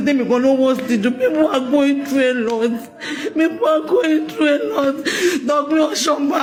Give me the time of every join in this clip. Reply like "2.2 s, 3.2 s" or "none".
none